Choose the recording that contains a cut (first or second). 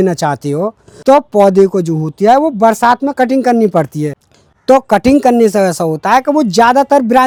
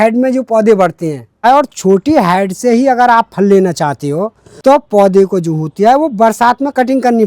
second